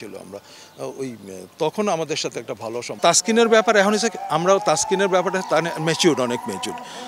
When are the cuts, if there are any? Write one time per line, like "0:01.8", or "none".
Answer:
0:03.0